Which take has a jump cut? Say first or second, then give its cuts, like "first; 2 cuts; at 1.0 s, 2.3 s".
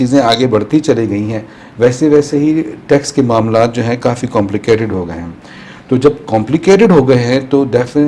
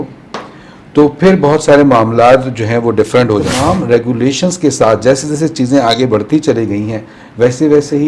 second; 1 cut; at 3.5 s